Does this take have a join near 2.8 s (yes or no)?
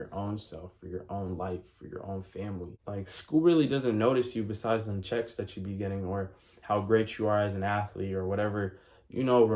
yes